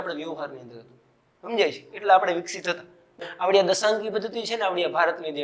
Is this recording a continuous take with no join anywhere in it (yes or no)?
no